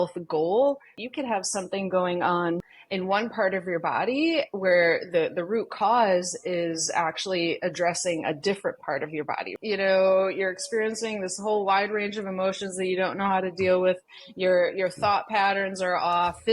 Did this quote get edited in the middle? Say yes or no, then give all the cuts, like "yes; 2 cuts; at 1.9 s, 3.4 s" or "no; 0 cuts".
yes; 3 cuts; at 1.0 s, 2.8 s, 9.5 s